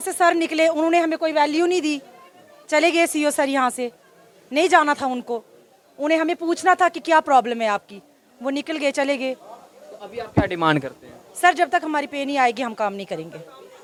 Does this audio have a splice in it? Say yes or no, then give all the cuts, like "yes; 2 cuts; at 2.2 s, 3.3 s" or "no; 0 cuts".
no; 0 cuts